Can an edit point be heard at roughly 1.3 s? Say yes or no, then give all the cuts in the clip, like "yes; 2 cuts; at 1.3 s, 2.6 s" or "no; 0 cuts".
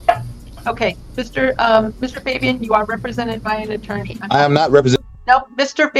no; 0 cuts